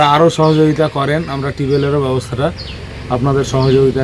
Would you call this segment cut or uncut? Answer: uncut